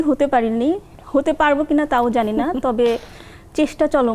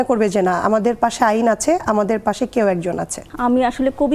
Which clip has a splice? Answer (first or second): second